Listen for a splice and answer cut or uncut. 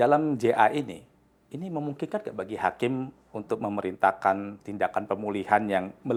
uncut